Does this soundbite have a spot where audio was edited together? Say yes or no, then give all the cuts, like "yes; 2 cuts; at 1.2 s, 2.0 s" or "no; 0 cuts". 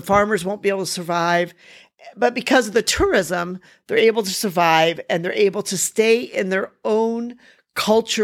no; 0 cuts